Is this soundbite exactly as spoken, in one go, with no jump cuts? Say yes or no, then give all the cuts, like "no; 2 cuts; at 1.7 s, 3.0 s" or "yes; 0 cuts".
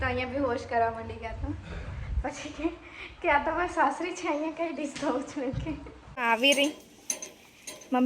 no; 1 cut; at 6.1 s